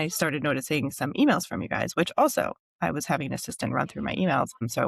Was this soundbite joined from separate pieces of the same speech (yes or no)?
no